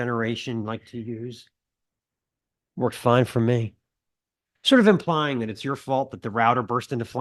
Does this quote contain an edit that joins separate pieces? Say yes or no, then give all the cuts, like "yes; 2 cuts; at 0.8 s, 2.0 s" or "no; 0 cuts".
no; 0 cuts